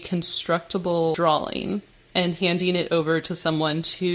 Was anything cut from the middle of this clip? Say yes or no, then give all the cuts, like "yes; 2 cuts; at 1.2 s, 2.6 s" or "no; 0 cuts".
yes; 2 cuts; at 1.2 s, 2.0 s